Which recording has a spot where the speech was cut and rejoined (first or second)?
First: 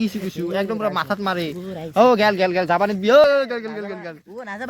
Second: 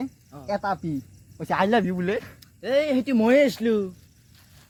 first